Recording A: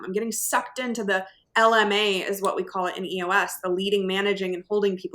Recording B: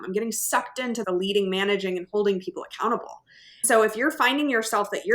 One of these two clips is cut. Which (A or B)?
B